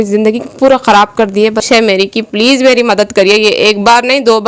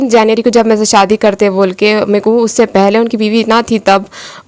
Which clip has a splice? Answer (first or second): first